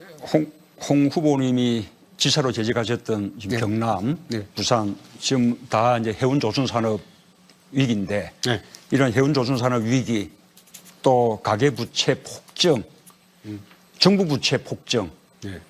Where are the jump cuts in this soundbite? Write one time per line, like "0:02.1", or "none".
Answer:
none